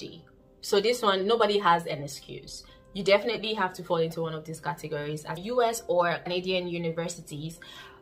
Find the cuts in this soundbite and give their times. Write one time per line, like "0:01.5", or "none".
0:05.4
0:06.3